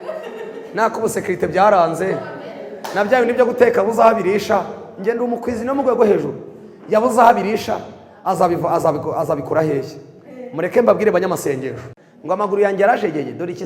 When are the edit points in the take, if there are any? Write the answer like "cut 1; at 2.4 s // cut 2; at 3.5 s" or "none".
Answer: cut 1; at 12.0 s